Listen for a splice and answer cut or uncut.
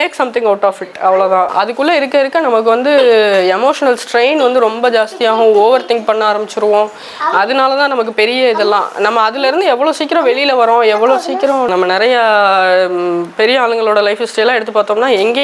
cut